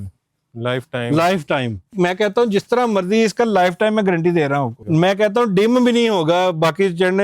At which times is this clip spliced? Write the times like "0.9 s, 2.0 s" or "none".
1.9 s, 4.8 s